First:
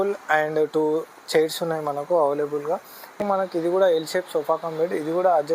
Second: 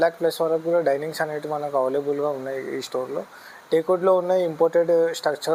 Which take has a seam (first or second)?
first